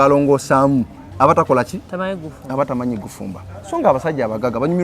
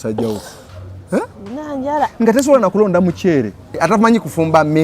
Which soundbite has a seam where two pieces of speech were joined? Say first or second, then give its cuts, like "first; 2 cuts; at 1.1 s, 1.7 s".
second; 1 cut; at 3.8 s